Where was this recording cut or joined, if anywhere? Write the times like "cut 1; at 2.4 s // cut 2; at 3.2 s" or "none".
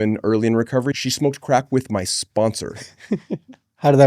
cut 1; at 1.0 s